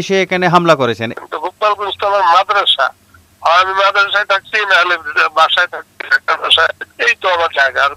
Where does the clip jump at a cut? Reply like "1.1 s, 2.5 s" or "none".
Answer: 1.1 s, 6.8 s